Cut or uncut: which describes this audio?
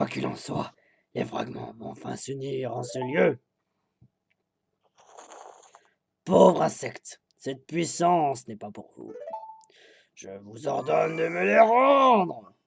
cut